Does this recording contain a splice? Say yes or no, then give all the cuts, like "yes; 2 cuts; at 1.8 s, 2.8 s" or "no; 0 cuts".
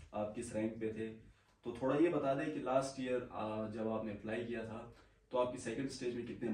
no; 0 cuts